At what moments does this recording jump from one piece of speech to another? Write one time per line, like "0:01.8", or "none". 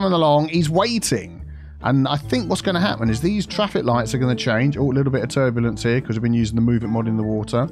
none